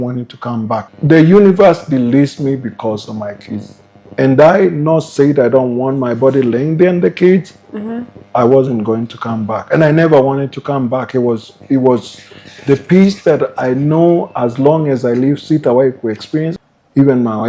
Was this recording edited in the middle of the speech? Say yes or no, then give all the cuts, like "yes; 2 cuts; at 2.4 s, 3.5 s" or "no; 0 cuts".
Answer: yes; 2 cuts; at 0.9 s, 16.5 s